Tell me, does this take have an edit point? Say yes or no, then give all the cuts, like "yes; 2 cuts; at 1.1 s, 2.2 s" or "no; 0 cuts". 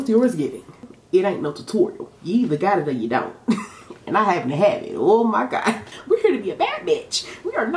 yes; 2 cuts; at 0.9 s, 5.9 s